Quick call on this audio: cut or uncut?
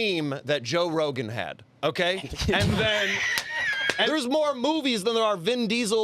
cut